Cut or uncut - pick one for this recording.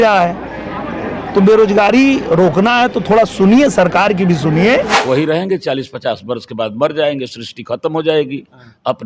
cut